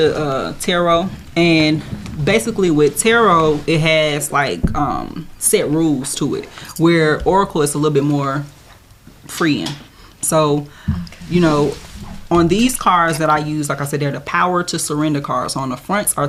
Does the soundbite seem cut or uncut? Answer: uncut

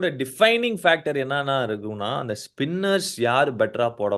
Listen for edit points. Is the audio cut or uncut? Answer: uncut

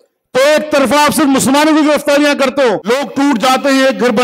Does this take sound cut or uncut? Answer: cut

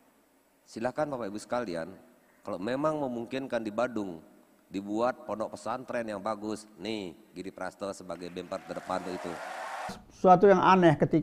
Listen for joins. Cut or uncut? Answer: cut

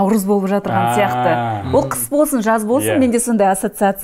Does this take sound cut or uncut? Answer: uncut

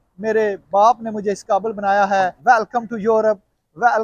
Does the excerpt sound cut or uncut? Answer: cut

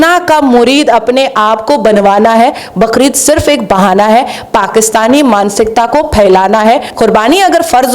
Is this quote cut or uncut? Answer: cut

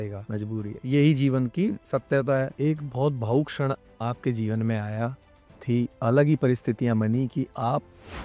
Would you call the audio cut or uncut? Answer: cut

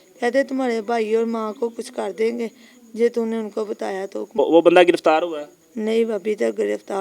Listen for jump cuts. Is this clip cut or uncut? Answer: cut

